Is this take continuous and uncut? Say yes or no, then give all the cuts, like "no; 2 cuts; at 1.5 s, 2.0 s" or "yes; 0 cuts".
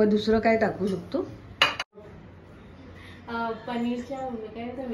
no; 1 cut; at 2.0 s